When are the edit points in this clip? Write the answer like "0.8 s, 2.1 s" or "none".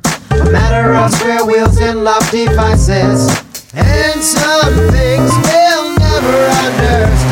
none